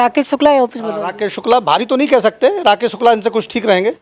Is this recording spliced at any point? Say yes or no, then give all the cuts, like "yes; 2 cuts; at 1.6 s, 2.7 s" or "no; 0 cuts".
no; 0 cuts